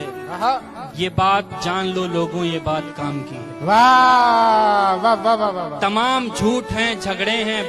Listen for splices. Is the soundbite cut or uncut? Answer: uncut